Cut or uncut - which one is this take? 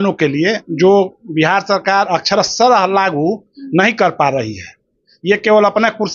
uncut